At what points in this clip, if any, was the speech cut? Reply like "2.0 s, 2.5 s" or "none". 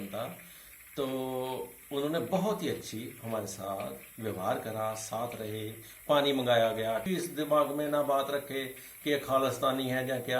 7.1 s